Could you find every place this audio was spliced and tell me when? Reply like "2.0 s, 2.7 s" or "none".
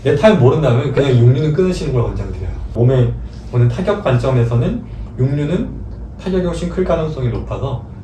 none